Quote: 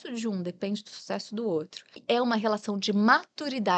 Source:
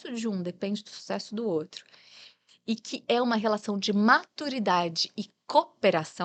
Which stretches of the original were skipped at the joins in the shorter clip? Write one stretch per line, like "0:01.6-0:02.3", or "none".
0:01.9-0:02.9